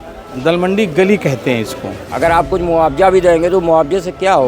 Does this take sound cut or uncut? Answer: cut